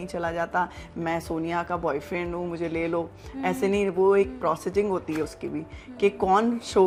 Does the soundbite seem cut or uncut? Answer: uncut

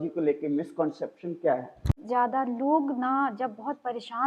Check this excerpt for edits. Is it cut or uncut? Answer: cut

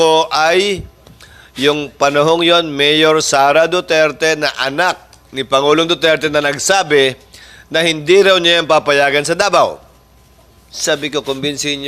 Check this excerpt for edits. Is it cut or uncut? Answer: uncut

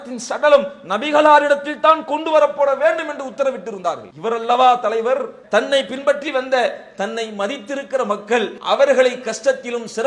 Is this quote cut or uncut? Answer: cut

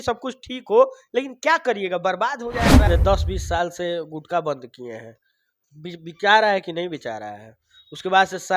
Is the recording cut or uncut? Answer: cut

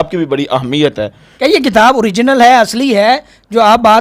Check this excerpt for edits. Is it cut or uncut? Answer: cut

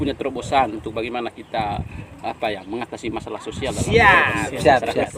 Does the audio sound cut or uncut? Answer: uncut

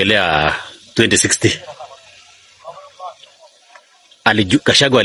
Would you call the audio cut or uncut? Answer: uncut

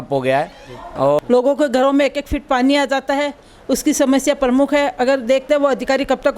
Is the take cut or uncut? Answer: cut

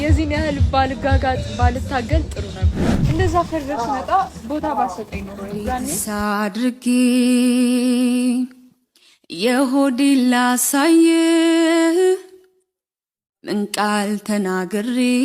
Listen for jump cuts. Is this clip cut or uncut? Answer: cut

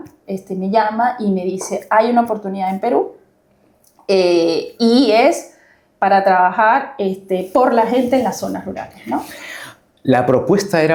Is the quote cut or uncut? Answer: uncut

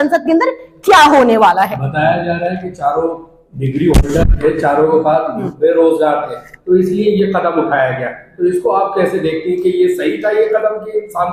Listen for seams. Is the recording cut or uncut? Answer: uncut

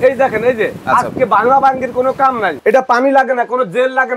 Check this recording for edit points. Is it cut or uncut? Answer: cut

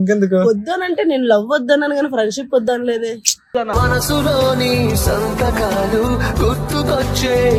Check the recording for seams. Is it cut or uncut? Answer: uncut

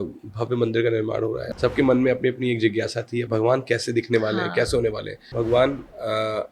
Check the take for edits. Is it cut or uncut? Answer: cut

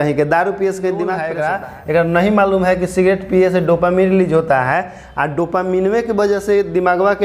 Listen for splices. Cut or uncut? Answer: cut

